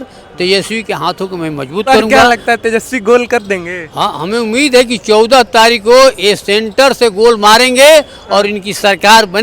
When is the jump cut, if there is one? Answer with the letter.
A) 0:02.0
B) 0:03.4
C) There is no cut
A